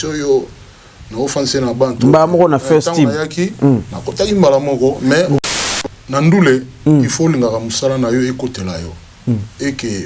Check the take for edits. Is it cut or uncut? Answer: cut